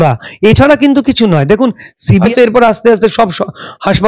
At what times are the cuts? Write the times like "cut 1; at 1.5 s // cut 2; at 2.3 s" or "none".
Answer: cut 1; at 1.9 s